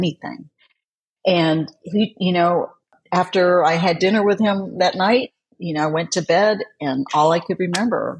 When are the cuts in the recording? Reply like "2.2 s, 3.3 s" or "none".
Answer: 2.8 s